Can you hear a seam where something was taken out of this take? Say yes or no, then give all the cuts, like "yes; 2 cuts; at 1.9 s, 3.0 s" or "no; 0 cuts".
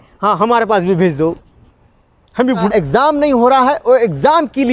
yes; 1 cut; at 2.7 s